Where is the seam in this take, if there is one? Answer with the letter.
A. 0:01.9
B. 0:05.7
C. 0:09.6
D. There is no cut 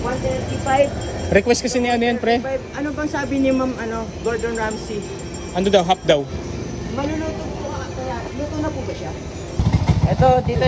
C